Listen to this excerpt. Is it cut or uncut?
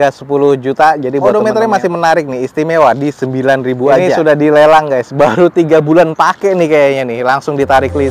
cut